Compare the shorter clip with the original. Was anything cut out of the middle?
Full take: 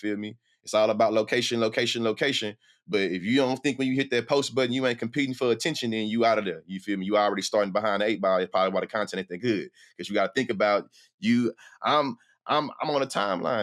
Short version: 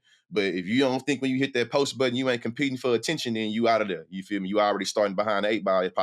no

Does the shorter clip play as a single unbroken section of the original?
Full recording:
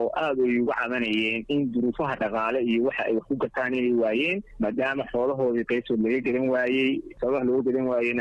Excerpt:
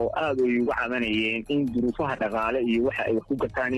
yes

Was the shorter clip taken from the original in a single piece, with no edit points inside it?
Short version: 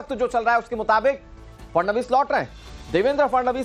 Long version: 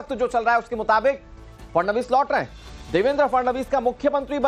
yes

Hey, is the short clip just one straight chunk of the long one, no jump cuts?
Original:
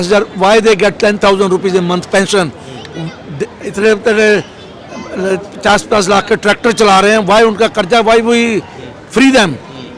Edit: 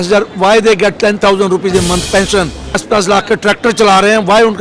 no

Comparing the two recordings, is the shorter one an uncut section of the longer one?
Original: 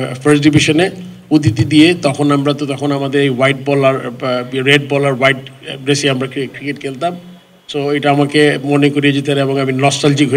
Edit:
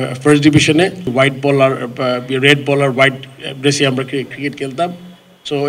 no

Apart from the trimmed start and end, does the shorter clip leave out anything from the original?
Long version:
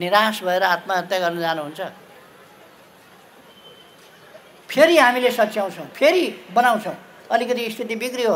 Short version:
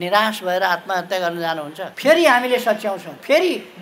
yes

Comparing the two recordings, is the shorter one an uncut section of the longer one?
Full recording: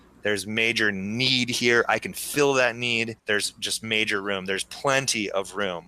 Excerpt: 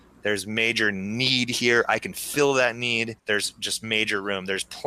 yes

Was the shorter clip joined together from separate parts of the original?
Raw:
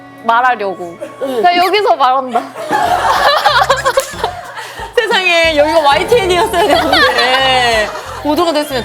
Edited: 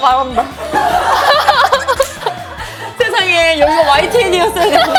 no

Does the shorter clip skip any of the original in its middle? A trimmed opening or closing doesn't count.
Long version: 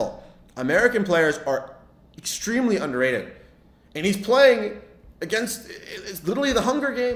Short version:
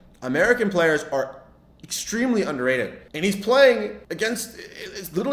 yes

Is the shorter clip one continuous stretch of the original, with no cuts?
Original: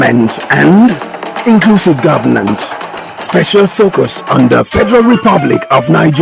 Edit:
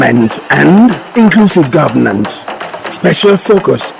no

